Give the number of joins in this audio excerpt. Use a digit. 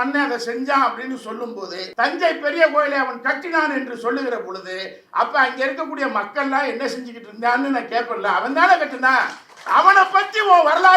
1